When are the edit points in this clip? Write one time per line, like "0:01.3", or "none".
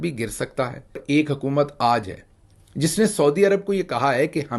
0:01.4